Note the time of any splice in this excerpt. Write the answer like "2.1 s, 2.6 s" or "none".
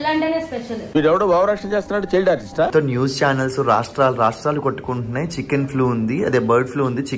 2.7 s

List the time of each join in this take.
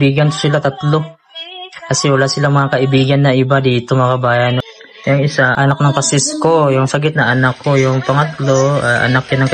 4.6 s, 5.5 s

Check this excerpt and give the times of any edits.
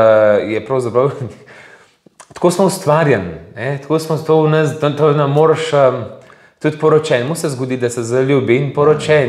none

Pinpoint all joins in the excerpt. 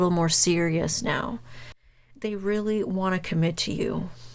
1.6 s

